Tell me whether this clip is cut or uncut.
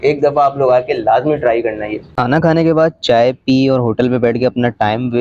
uncut